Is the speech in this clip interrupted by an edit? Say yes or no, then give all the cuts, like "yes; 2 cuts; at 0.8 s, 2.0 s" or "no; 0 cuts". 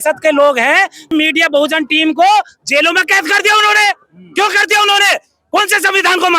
yes; 1 cut; at 1.0 s